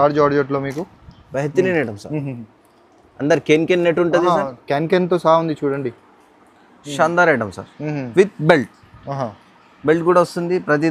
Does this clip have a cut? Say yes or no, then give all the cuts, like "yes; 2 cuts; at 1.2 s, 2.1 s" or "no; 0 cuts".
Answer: no; 0 cuts